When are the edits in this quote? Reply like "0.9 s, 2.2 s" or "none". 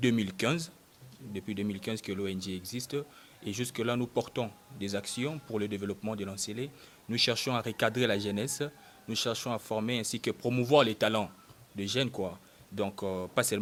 none